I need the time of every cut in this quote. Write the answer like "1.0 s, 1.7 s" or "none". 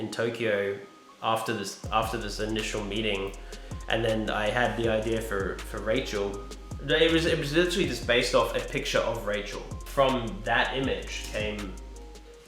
9.8 s